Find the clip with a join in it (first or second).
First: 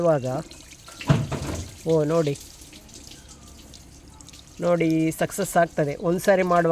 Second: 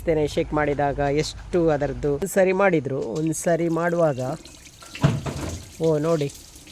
second